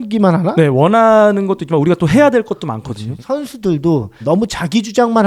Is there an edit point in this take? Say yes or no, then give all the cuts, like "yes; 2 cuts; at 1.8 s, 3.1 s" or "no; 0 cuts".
yes; 1 cut; at 3.1 s